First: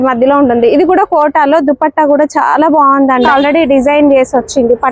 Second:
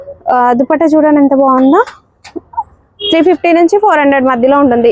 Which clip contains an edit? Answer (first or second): first